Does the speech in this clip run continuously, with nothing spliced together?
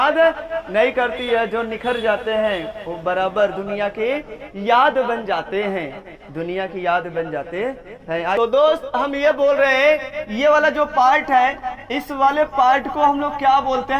no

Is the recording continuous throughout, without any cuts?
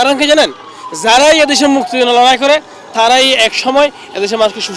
yes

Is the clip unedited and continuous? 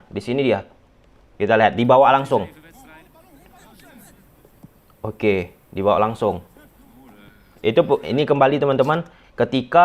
yes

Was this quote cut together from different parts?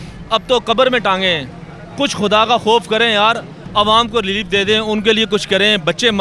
no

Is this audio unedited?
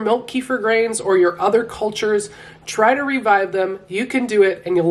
yes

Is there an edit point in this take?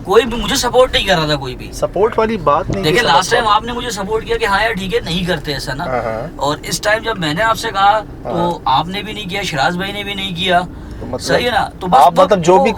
no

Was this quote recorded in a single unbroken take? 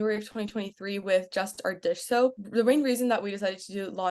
no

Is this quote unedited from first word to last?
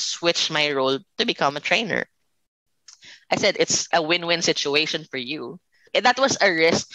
no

